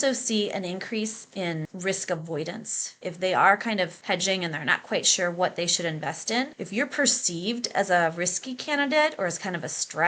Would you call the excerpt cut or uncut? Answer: cut